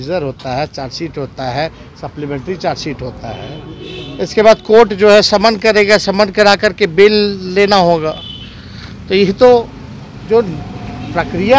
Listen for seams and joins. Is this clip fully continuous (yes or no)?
yes